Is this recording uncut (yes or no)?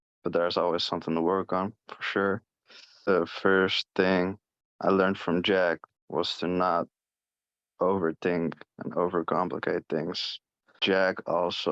no